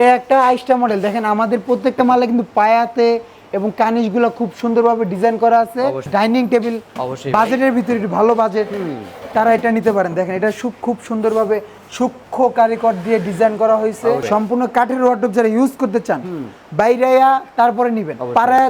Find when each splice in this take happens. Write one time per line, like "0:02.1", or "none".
0:06.0
0:14.2